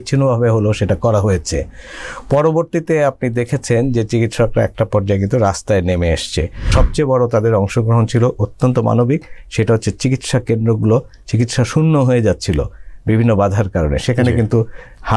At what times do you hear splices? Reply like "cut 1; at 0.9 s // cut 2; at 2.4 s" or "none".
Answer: cut 1; at 6.7 s